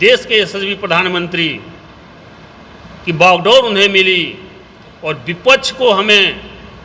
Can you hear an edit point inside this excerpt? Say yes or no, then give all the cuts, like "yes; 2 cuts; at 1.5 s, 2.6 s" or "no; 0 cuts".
no; 0 cuts